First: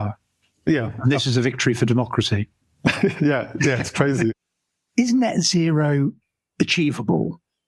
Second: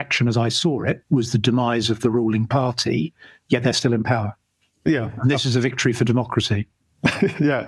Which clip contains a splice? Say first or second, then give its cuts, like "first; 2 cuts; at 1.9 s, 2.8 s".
first; 1 cut; at 4.5 s